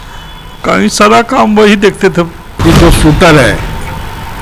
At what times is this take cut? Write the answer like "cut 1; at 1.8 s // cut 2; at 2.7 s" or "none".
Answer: cut 1; at 2.4 s